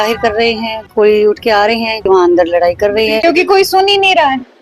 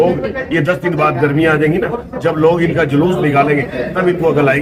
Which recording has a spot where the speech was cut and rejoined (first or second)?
first